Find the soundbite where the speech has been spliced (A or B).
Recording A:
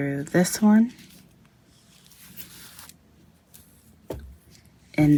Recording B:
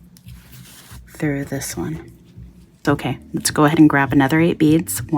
B